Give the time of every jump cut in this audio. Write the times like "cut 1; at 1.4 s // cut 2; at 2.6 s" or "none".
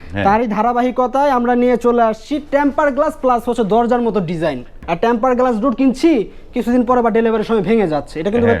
cut 1; at 4.8 s